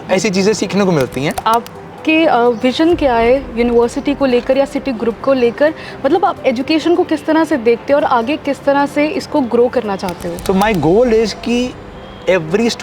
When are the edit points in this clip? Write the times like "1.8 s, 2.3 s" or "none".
1.4 s, 10.3 s